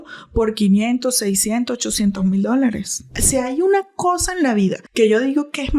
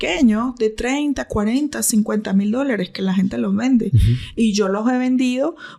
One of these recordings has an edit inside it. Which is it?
first; 2 cuts; at 3.1 s, 4.8 s

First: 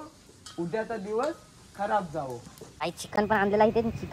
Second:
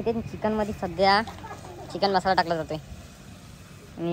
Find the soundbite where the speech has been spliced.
first; 1 cut; at 2.8 s

